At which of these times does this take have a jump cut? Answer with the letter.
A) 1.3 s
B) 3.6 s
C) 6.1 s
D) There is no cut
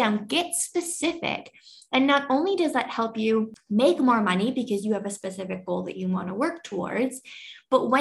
B